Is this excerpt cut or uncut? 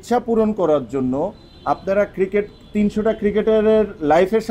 uncut